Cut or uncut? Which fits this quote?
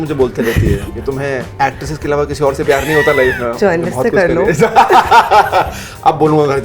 cut